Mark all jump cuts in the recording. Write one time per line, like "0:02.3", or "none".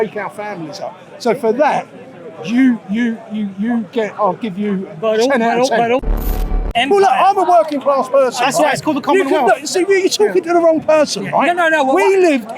0:06.5